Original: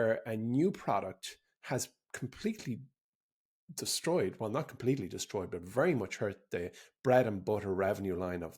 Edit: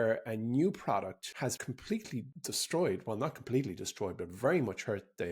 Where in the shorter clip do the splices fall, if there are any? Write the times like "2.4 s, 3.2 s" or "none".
1.5 s, 2.3 s